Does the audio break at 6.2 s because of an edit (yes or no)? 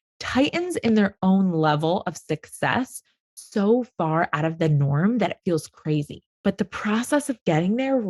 yes